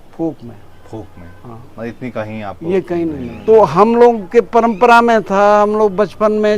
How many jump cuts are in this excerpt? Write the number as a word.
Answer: one